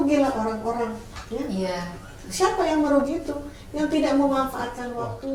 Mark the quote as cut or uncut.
uncut